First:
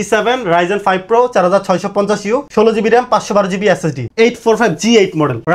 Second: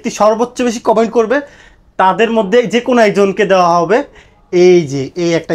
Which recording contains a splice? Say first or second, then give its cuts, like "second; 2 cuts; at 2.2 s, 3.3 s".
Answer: first; 2 cuts; at 2.5 s, 4.0 s